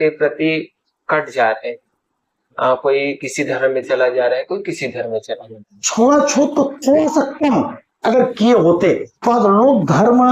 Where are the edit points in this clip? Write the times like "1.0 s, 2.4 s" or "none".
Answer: 5.9 s